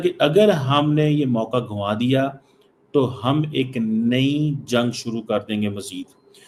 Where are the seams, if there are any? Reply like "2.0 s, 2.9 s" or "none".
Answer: none